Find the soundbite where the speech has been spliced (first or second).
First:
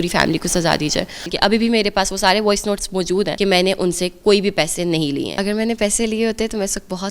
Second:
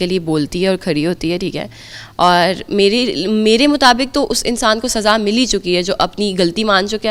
first